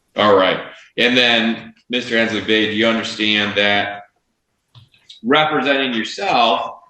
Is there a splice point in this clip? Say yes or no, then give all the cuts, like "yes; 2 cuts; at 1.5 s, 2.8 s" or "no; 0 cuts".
no; 0 cuts